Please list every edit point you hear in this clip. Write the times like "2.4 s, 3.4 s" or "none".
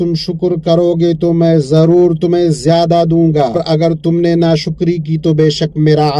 3.6 s